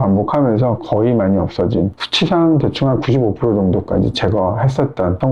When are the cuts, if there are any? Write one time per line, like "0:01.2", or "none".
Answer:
0:01.9